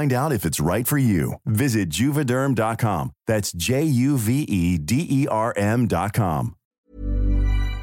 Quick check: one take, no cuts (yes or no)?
no